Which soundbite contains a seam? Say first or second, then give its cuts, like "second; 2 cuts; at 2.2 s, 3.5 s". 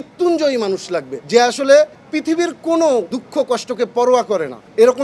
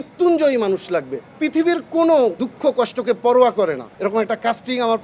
second; 2 cuts; at 1.2 s, 3.9 s